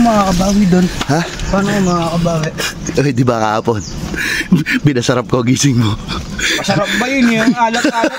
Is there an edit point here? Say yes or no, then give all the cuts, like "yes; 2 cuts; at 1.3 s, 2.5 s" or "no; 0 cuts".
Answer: no; 0 cuts